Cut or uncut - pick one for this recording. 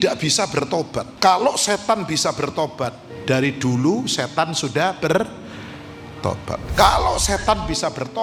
cut